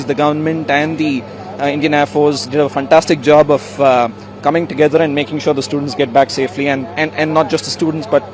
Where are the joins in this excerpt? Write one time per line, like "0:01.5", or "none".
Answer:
none